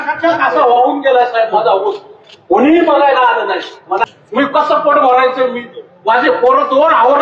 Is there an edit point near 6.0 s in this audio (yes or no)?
no